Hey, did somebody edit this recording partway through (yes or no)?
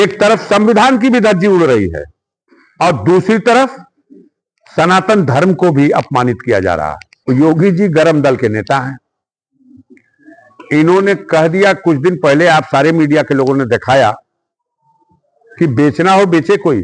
yes